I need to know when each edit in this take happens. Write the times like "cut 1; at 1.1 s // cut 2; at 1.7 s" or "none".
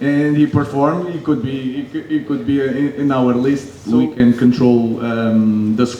cut 1; at 3.7 s